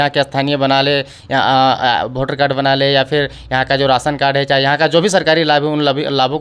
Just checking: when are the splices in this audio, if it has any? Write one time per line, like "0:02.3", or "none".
none